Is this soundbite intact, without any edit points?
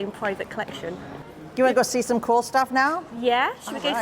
no; 1 cut; at 1.2 s

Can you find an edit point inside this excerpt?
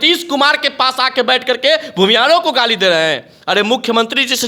no; 0 cuts

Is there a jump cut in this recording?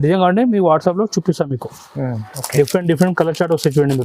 yes; 1 cut; at 2.3 s

